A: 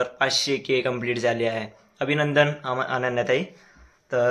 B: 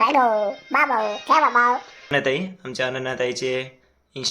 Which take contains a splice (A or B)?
B